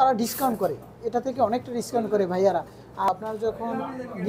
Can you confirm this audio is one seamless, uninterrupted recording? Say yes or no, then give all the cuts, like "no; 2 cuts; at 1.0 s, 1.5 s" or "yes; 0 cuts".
no; 1 cut; at 3.1 s